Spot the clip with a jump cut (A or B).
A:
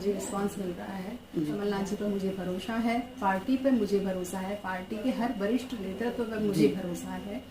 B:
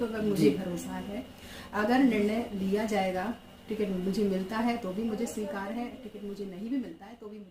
A